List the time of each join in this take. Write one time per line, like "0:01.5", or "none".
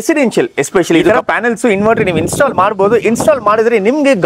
0:01.1

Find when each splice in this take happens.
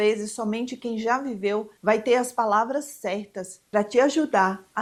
none

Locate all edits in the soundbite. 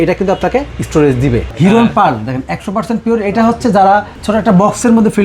0:01.1

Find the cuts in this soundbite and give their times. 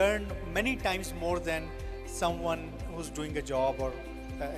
none

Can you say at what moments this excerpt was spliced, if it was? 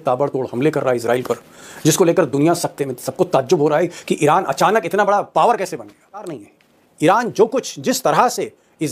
0:06.4

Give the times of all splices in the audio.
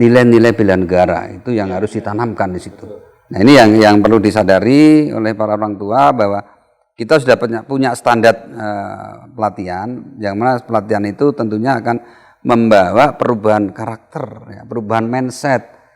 0:02.7

